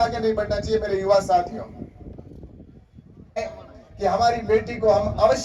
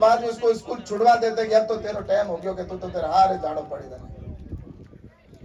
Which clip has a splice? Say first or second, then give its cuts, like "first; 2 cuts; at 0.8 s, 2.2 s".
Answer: first; 1 cut; at 3.4 s